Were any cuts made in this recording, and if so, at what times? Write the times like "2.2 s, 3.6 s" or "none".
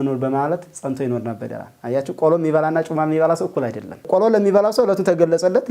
none